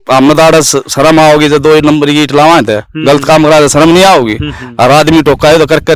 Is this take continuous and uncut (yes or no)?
yes